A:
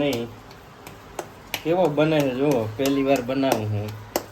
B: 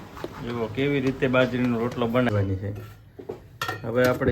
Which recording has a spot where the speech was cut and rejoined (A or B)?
B